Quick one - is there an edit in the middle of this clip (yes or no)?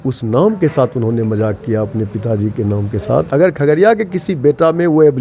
yes